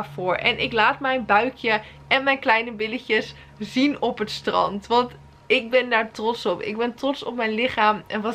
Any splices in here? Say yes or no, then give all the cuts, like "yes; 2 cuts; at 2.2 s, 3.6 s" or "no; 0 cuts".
no; 0 cuts